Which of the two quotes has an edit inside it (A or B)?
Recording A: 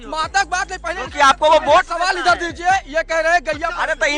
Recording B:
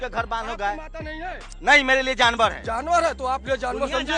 B